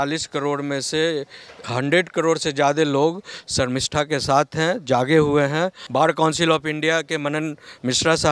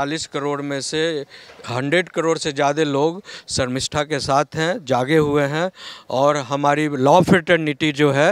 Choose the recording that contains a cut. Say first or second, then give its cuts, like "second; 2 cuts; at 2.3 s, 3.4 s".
first; 1 cut; at 5.8 s